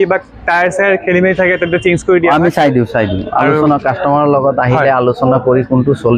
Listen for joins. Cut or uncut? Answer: uncut